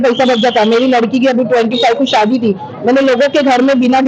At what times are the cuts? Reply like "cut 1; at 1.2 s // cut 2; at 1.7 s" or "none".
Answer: none